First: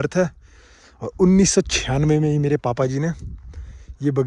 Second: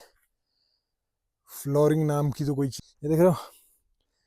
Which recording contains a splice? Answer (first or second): second